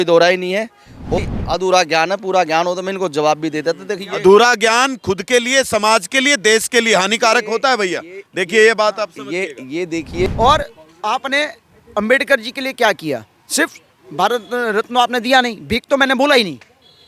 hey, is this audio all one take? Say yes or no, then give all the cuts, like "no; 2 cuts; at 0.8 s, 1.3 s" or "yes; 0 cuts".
no; 2 cuts; at 1.2 s, 10.3 s